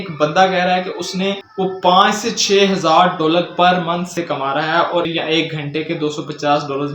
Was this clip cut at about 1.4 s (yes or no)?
no